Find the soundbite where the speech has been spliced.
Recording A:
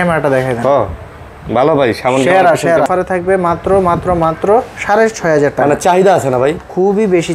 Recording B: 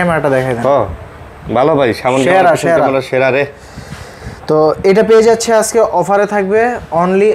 A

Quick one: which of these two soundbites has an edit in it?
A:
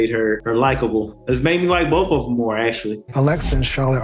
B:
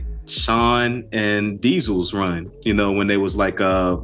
A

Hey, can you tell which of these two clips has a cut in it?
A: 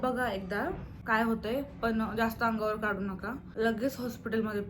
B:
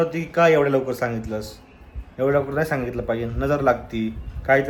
A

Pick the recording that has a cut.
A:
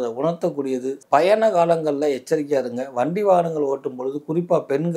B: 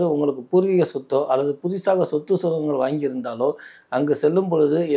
A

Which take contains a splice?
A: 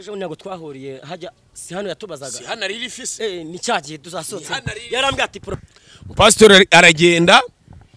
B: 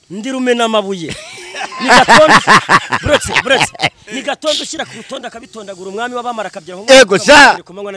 A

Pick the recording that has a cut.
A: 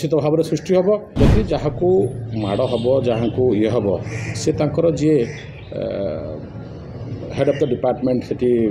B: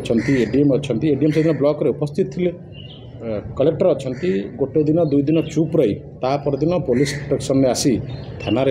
A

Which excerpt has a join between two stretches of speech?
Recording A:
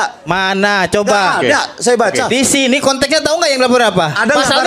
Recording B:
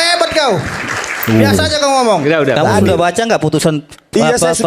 B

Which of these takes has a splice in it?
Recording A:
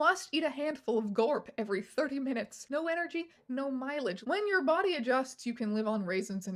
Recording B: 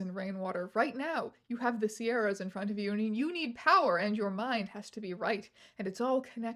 A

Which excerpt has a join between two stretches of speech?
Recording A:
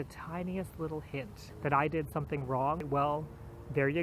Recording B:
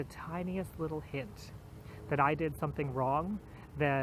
A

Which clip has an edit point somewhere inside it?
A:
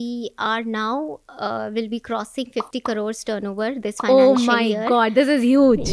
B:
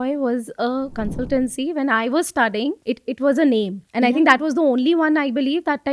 B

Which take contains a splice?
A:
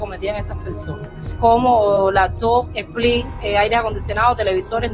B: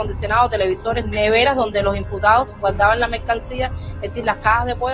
A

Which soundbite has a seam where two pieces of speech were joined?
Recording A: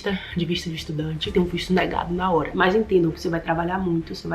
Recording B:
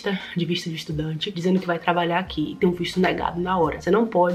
A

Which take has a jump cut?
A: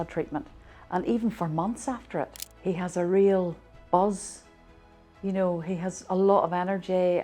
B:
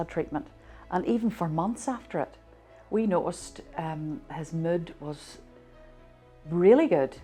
A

